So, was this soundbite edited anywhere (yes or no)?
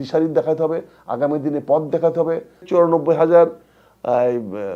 yes